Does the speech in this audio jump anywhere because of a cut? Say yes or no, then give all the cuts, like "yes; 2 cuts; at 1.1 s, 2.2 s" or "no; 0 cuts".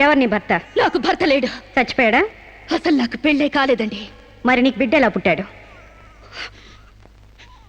no; 0 cuts